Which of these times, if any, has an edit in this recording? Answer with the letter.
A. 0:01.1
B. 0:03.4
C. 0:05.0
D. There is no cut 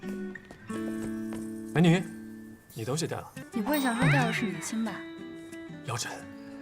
B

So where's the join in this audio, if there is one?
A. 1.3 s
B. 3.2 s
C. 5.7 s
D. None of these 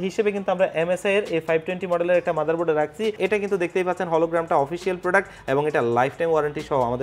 B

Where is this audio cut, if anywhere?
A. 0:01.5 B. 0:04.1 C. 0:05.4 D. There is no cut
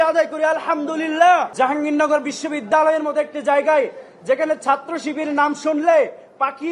A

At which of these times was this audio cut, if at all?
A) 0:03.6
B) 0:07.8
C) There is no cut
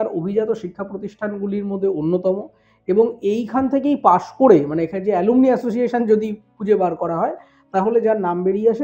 C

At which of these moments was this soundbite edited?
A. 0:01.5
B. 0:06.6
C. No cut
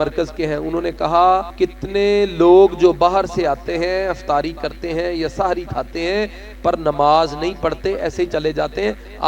A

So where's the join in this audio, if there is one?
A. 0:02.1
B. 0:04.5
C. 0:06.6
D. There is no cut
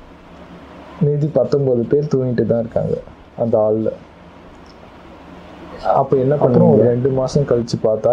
C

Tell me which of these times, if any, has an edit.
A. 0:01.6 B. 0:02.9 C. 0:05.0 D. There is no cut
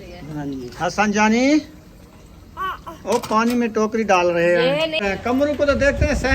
C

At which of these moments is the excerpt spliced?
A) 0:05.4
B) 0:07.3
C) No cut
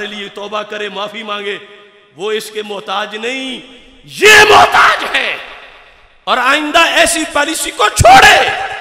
C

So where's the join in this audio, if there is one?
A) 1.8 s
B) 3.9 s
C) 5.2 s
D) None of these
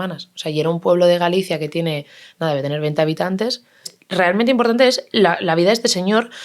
B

